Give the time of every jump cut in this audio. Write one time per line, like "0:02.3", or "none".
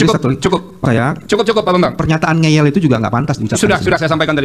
none